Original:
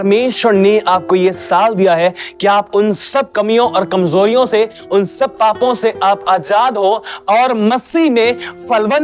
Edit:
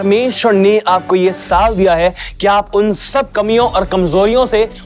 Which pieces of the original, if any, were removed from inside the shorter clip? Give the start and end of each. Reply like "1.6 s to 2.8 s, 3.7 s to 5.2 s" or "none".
none

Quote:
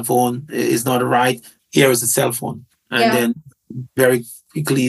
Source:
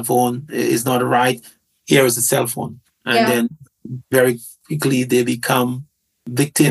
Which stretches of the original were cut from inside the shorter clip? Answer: 1.5 s to 1.7 s

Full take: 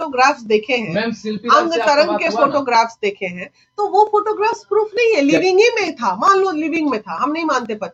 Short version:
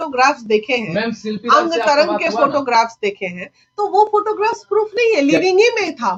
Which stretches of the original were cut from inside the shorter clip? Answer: none

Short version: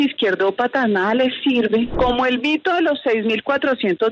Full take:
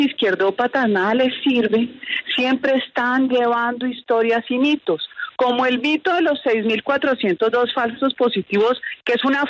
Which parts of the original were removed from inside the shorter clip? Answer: 1.9 s to 5.3 s

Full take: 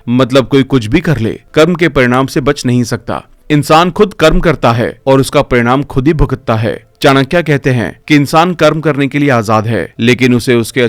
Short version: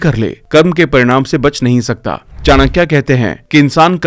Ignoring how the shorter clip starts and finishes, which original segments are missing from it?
3.3 s to 6.9 s

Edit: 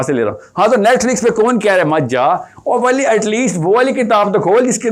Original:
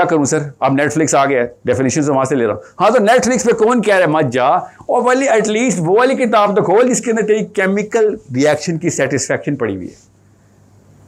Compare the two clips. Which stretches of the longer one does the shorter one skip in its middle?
none

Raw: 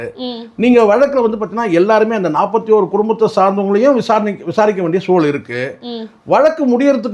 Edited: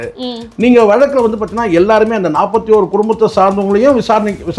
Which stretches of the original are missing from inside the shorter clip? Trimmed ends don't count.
none

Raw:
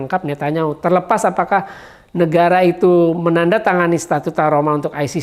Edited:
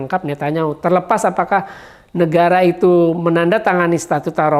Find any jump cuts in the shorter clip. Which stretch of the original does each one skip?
none

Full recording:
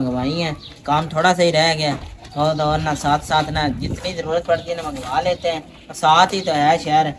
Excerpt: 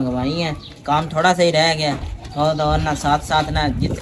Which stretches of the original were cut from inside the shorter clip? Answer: none

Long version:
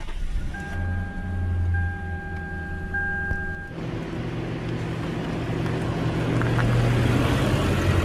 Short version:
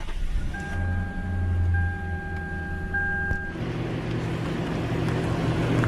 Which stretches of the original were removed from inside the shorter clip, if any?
3.5 s to 4.1 s

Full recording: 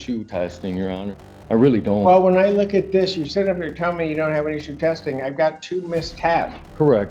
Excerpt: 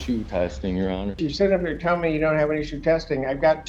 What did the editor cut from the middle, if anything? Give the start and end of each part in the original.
1.2 s to 3.2 s

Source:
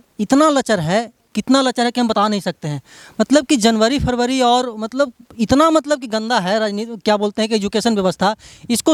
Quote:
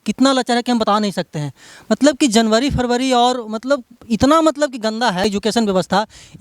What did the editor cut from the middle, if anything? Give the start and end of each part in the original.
6.5 s to 7.5 s

